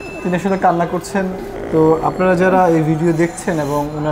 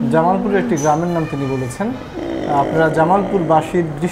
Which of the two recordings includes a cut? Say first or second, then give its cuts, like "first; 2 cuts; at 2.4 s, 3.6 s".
first; 1 cut; at 1.5 s